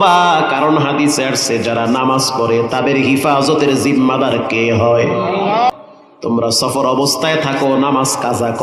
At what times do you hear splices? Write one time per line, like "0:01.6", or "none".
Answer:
0:05.7